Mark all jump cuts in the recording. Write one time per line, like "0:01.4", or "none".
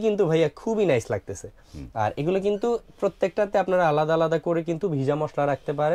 none

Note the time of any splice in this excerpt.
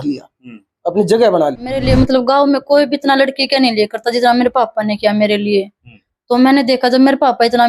0:01.8

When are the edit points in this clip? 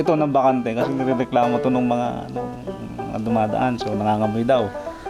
none

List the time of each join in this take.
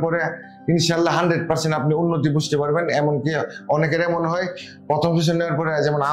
none

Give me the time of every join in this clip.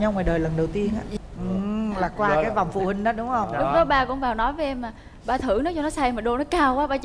0:01.1

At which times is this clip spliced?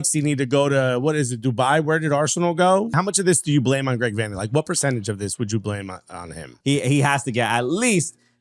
0:02.9
0:06.6

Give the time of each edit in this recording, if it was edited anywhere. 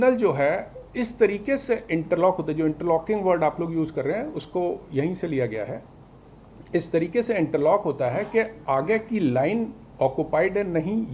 none

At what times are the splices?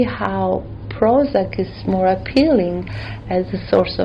0:01.8

